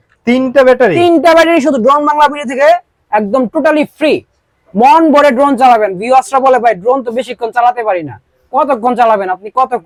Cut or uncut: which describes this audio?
uncut